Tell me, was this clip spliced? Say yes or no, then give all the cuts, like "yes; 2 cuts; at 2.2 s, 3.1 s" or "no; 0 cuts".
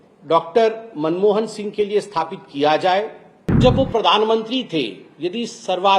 yes; 1 cut; at 3.6 s